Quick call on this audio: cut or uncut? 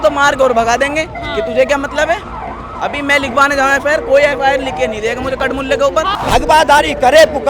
cut